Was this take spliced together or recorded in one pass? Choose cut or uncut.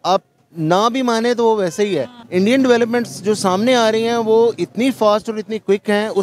cut